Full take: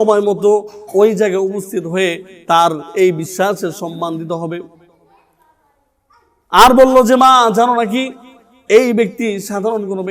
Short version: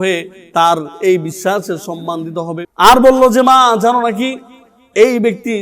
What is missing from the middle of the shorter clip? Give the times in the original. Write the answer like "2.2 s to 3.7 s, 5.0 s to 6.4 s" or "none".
4.6 s to 6.4 s